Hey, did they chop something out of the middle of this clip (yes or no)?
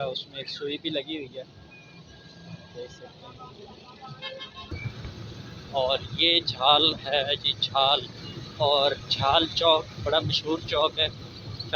yes